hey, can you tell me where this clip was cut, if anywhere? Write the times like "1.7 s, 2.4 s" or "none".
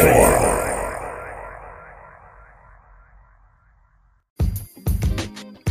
4.3 s

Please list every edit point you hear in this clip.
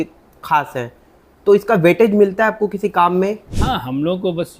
3.5 s

